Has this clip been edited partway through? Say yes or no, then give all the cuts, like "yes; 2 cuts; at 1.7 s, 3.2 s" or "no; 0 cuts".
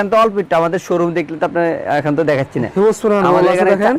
no; 0 cuts